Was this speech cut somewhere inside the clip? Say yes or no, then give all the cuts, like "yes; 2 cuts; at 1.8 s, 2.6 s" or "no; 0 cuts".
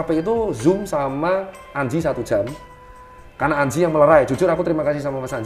no; 0 cuts